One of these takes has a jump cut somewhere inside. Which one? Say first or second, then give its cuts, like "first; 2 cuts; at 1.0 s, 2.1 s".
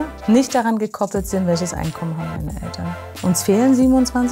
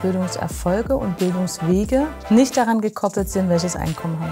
first; 1 cut; at 3.2 s